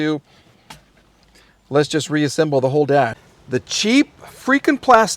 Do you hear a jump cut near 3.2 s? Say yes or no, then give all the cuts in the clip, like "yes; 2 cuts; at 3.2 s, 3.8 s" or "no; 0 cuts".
yes; 1 cut; at 3.2 s